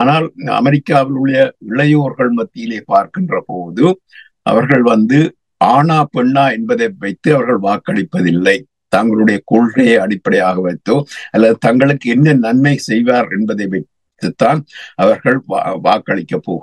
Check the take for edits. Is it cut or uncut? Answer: uncut